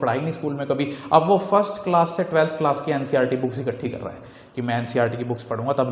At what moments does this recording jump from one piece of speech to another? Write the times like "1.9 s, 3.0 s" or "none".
none